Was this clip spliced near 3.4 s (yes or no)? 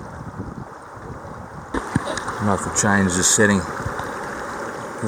no